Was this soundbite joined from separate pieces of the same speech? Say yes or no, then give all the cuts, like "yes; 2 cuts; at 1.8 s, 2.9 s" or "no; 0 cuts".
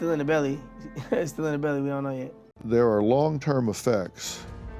yes; 1 cut; at 2.3 s